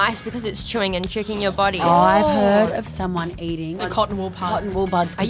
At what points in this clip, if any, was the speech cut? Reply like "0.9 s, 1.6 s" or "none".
1.8 s, 3.8 s